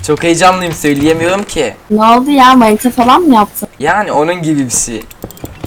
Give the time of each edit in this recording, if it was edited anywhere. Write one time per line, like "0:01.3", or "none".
0:01.8
0:03.6